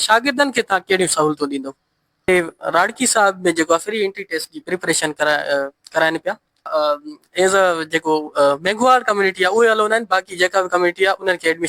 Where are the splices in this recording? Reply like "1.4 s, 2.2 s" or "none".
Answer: 2.3 s, 6.7 s